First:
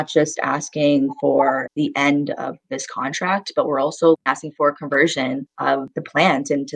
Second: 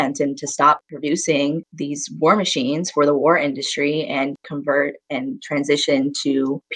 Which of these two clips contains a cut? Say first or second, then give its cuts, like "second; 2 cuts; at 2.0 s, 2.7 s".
first; 2 cuts; at 2.6 s, 4.2 s